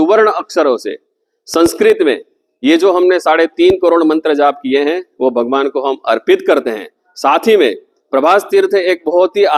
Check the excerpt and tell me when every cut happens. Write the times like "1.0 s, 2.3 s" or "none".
none